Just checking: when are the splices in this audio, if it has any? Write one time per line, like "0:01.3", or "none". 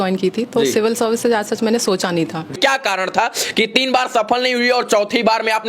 0:02.5